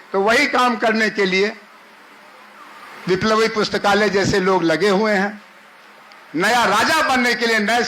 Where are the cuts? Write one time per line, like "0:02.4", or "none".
0:06.2